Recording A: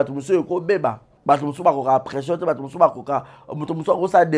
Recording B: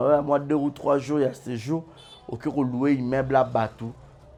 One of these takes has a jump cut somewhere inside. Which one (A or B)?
A